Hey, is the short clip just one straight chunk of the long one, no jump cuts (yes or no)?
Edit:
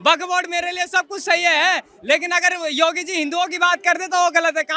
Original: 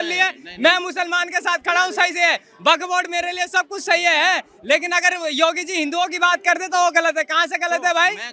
yes